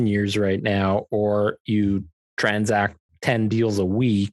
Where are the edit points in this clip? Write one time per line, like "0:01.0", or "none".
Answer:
0:03.1